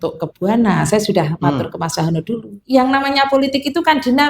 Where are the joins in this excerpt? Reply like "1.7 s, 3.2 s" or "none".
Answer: 2.5 s